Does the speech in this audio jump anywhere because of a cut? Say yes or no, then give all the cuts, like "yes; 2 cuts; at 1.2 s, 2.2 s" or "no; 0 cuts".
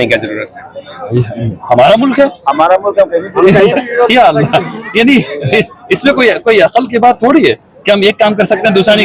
no; 0 cuts